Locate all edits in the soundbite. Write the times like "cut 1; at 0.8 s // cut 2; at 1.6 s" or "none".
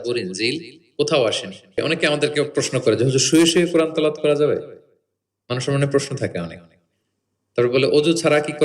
cut 1; at 1.8 s